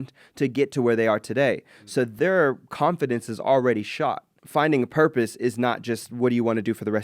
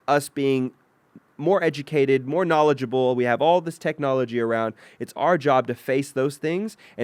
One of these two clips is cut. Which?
first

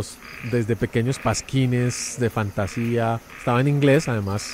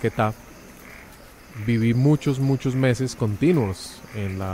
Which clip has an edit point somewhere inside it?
first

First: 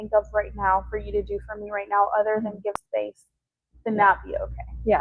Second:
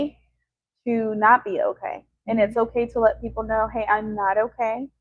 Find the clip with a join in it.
first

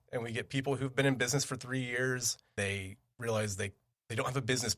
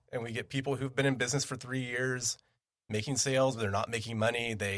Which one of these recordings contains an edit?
first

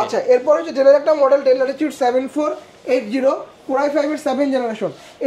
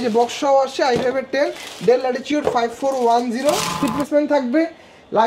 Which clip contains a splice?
second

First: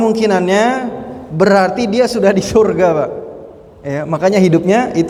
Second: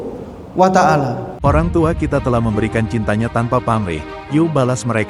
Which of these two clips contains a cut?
second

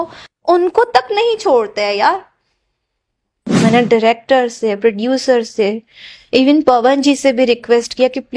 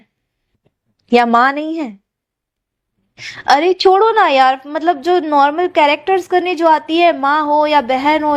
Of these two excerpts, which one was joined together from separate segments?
first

